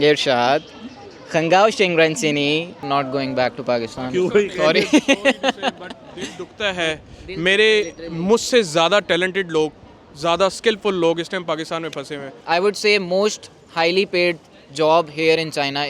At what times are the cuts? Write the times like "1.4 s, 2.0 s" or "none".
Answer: 2.8 s, 12.4 s